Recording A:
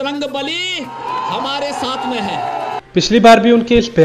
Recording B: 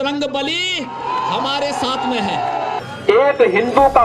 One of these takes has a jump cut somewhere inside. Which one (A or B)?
B